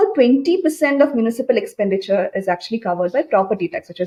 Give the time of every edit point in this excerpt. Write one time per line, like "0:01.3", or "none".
none